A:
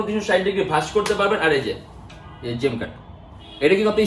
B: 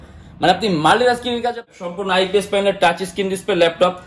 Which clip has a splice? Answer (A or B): B